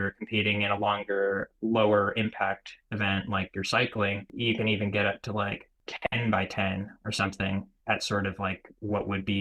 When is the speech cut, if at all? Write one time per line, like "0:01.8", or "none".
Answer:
0:01.5
0:04.3
0:05.9
0:07.7

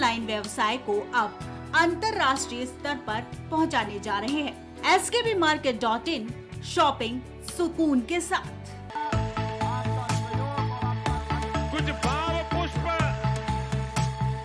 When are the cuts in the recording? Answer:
0:08.8

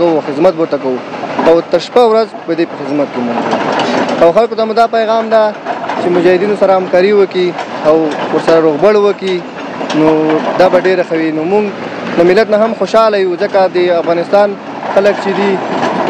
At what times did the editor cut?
none

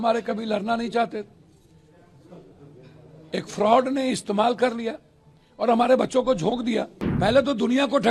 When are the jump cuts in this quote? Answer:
0:07.0

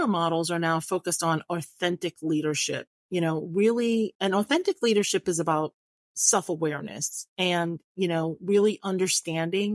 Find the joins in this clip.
none

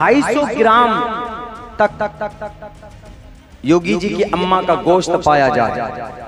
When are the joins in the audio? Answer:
none

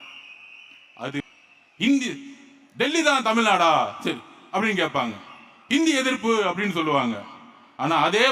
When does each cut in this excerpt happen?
0:01.2

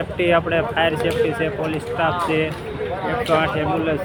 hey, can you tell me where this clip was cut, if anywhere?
none

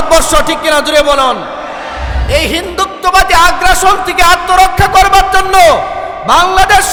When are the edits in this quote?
none

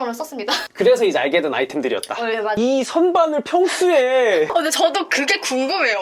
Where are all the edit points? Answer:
0:02.6

